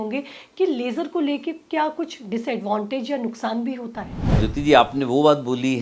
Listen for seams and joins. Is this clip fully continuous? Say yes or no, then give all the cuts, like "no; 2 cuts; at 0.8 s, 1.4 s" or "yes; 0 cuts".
no; 1 cut; at 4.4 s